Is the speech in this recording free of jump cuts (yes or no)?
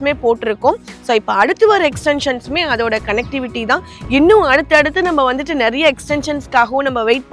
yes